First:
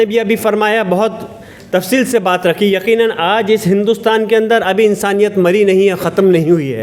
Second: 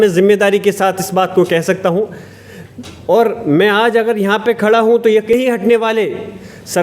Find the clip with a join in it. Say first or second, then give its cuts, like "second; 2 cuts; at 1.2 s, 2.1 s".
second; 1 cut; at 5.3 s